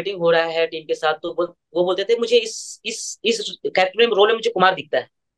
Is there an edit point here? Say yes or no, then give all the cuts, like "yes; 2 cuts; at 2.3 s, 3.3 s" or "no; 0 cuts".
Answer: no; 0 cuts